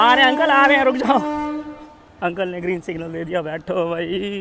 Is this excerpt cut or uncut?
uncut